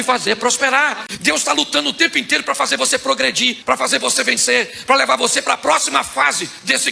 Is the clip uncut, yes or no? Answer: no